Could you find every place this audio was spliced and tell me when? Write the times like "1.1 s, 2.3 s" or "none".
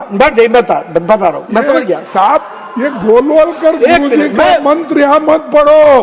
none

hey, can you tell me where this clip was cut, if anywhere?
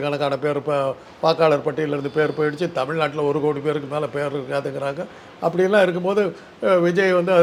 none

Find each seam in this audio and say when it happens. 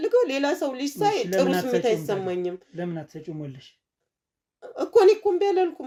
none

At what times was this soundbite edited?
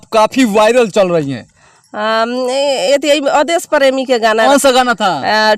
4.4 s

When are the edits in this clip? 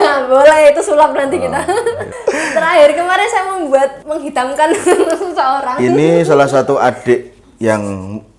2.1 s, 4.0 s

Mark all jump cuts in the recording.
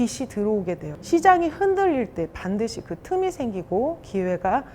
0.9 s

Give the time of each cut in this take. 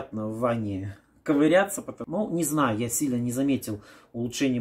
2.0 s

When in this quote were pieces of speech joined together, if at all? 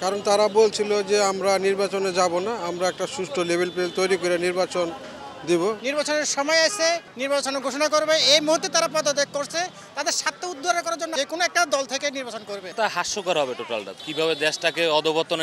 5.8 s, 7.1 s, 11.1 s, 12.6 s, 13.9 s

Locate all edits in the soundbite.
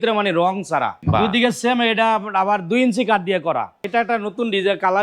1.0 s, 3.8 s

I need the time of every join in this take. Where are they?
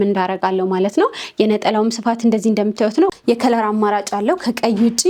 3.2 s

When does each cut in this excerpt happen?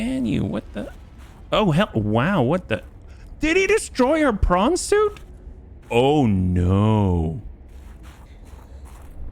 none

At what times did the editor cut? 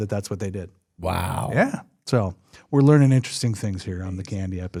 none

